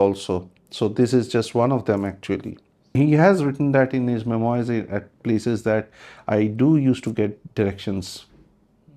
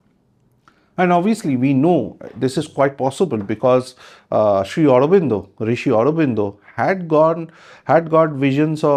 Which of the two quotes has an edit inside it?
first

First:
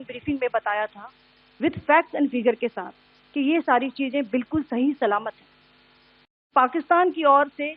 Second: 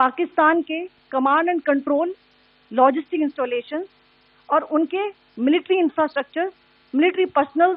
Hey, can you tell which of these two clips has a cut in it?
first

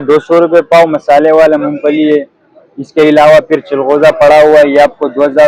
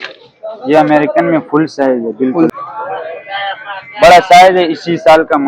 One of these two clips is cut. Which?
second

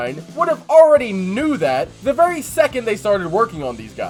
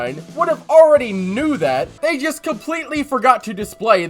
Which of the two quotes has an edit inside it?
second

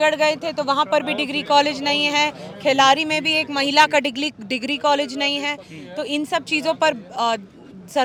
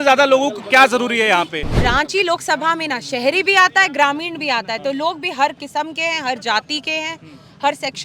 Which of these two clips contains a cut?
second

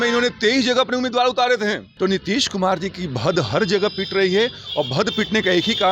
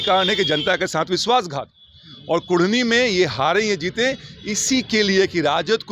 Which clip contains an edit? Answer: first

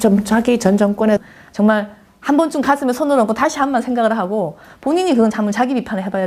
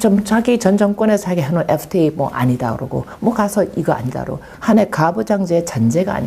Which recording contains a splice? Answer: second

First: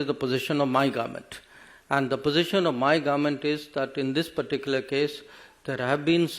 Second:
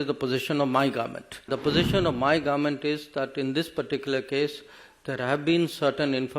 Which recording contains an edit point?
second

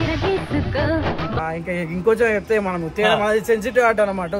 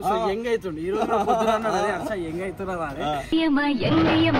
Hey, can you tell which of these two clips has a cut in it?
first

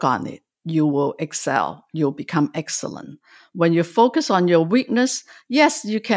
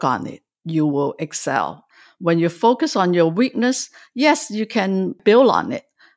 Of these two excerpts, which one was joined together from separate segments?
second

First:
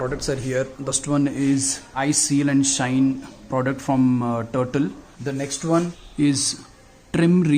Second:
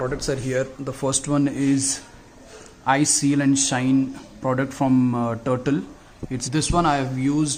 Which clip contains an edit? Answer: first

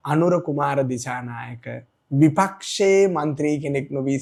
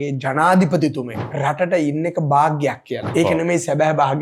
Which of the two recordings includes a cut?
second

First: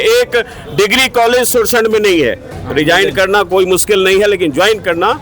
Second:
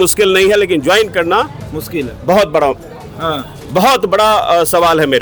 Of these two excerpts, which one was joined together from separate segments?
first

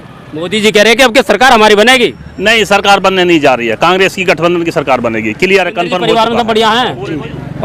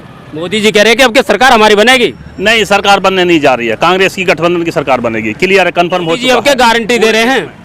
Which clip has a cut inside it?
second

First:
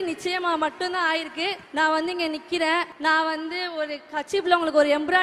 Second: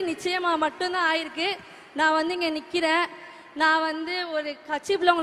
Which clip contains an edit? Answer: first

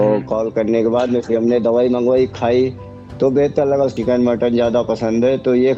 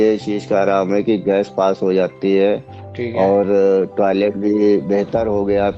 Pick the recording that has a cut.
first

